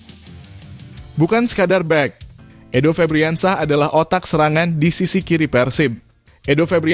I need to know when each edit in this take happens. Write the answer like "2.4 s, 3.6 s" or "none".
1.1 s